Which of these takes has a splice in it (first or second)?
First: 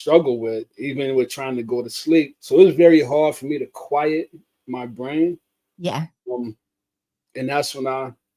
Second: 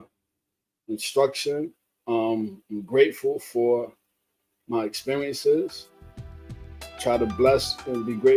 first